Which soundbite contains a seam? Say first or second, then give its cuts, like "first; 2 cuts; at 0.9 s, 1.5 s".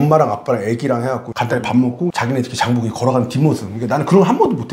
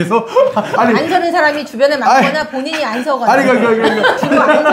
first; 2 cuts; at 1.3 s, 2.1 s